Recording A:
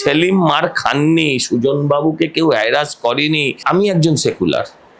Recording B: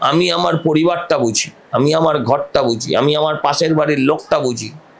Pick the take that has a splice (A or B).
A